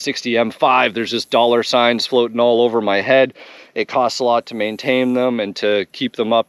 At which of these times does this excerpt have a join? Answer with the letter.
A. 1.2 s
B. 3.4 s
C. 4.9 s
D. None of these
D